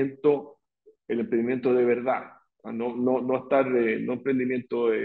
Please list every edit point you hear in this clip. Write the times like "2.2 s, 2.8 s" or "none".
none